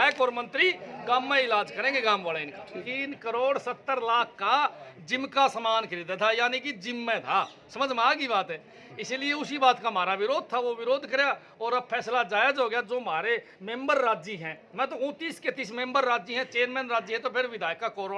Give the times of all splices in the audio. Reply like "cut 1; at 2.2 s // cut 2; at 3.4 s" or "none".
cut 1; at 2.8 s